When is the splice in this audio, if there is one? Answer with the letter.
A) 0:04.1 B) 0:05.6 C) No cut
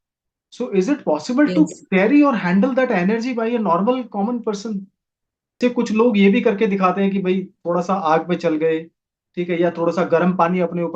B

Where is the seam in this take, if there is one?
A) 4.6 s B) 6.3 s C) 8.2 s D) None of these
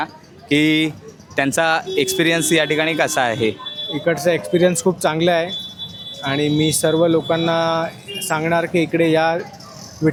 D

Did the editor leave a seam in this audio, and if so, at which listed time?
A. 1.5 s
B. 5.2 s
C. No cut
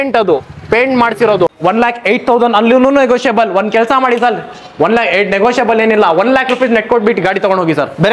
A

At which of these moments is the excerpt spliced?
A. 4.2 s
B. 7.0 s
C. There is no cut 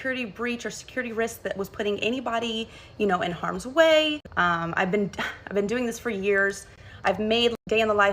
A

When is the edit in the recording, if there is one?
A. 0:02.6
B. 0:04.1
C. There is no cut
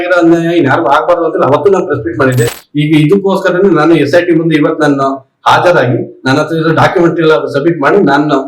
A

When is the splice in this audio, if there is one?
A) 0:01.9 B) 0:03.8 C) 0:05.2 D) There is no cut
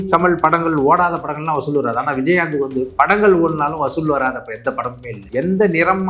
C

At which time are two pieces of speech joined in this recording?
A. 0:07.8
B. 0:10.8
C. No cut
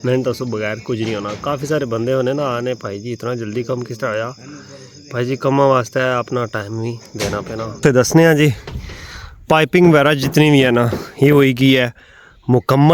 A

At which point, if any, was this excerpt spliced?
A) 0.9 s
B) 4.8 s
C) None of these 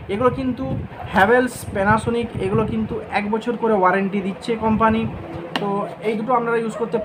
C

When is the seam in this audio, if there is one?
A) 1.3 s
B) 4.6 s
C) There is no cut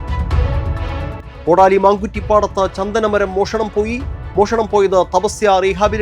A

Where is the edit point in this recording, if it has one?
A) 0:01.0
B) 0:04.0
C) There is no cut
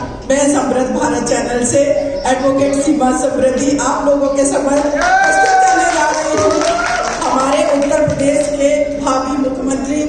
C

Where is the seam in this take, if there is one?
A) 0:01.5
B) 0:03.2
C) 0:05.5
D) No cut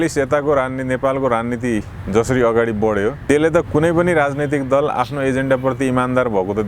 B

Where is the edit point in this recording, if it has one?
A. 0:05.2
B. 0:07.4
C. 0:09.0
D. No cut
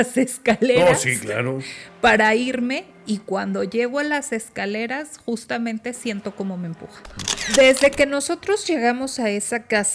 B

